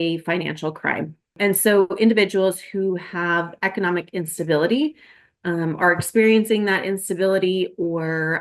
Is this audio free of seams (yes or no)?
no